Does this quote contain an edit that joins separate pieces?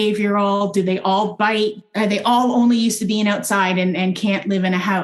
yes; 1 cut; at 1.8 s

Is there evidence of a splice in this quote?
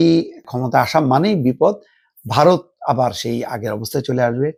no; 0 cuts

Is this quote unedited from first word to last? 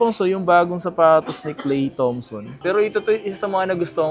no; 1 cut; at 2.6 s

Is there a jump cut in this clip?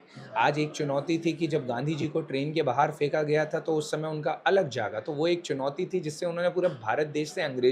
no; 0 cuts

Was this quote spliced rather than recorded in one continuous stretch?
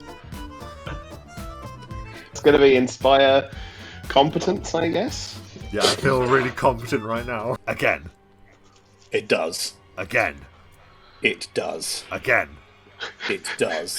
yes; 2 cuts; at 2.4 s, 7.6 s

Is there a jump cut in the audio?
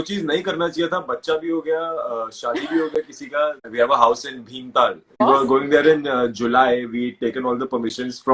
yes; 2 cuts; at 3.6 s, 5.2 s

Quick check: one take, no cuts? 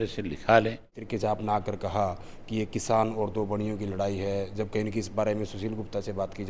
no; 1 cut; at 1.0 s

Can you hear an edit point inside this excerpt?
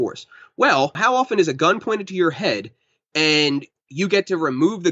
yes; 1 cut; at 1.0 s

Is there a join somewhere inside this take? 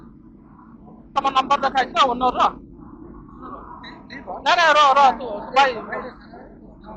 yes; 1 cut; at 1.1 s

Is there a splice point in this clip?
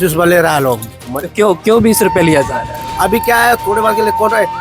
no; 0 cuts

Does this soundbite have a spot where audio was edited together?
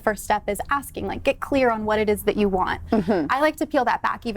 no; 0 cuts

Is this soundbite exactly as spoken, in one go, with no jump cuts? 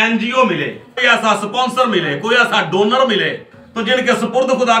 no; 2 cuts; at 1.0 s, 3.5 s

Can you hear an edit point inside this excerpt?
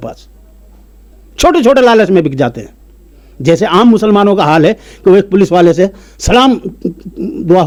no; 0 cuts

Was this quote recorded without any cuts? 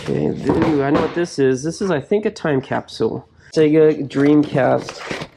no; 1 cut; at 3.5 s

